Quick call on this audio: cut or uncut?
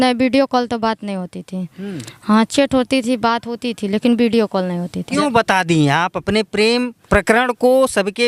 cut